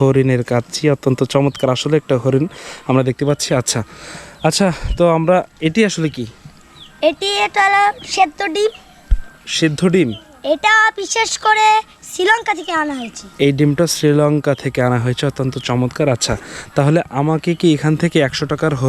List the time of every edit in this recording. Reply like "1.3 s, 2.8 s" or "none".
none